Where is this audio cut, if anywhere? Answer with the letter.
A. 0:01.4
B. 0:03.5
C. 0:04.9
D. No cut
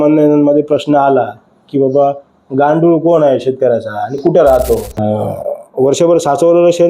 C